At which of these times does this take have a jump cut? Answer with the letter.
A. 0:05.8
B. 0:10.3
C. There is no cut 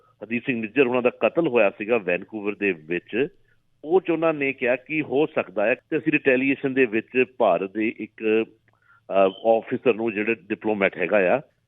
A